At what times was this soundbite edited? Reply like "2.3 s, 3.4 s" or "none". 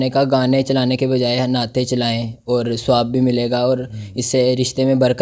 none